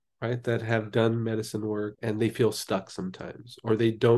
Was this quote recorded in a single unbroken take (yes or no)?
yes